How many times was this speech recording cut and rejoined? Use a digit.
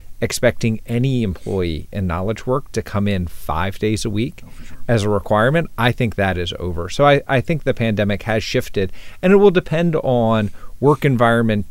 0